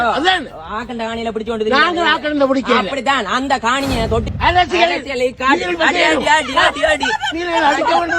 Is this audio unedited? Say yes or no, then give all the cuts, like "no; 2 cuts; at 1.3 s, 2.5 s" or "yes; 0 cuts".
no; 1 cut; at 4.3 s